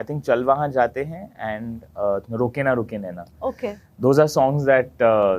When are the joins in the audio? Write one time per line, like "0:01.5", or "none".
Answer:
none

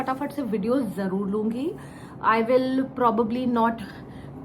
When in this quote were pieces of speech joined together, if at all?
none

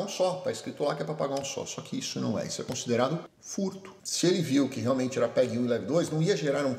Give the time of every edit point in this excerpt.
0:03.9

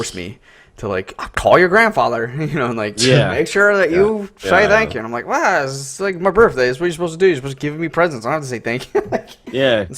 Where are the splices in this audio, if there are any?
0:08.5

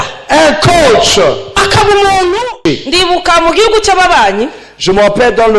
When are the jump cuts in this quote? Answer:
0:02.5

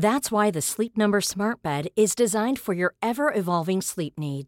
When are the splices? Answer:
none

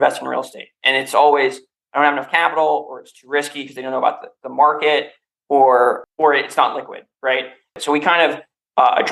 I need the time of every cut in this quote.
0:07.8

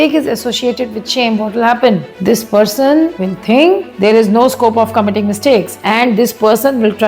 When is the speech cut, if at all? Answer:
0:02.1
0:03.3
0:03.9
0:05.7

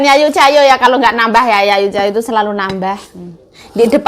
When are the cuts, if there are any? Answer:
none

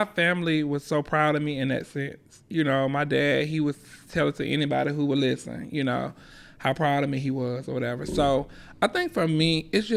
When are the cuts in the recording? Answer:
none

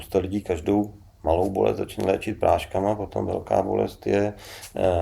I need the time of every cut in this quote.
none

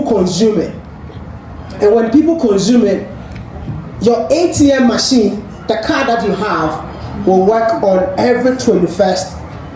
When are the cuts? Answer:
none

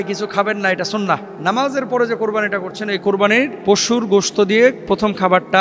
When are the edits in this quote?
0:01.3
0:03.5

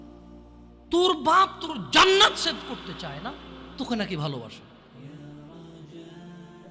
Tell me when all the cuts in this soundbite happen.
none

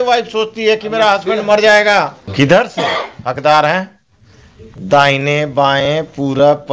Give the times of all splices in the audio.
0:02.3

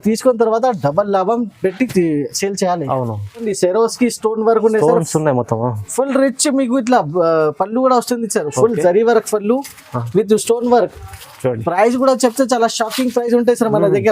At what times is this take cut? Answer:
0:03.4

